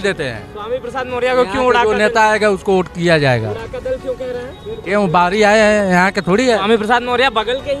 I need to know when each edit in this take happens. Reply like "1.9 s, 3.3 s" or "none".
none